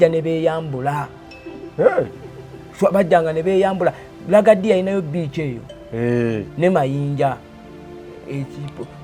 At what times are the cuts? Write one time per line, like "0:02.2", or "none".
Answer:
none